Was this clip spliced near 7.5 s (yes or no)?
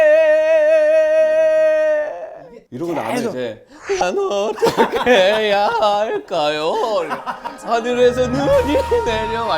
no